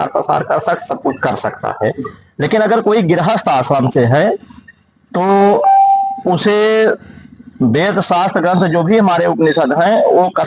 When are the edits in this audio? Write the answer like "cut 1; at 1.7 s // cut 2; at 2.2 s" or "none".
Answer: none